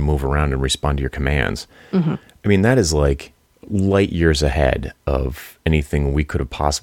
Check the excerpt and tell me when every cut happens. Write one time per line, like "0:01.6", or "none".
none